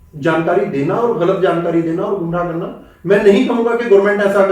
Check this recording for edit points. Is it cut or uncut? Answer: uncut